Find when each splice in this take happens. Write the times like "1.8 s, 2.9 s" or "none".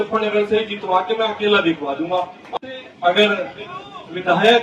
2.5 s